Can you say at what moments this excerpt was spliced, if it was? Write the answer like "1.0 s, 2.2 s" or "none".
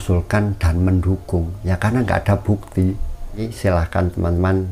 3.5 s